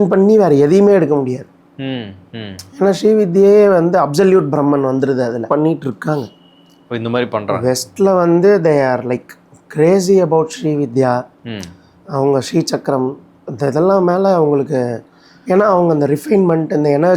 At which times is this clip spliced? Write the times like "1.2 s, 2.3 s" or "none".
5.5 s